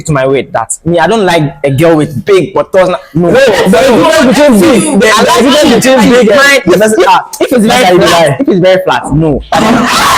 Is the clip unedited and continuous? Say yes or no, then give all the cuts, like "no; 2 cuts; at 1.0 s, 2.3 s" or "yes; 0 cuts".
yes; 0 cuts